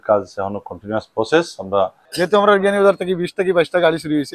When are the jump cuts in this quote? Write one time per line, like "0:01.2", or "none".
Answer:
0:02.0